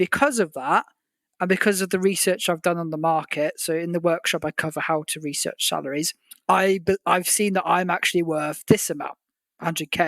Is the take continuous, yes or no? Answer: no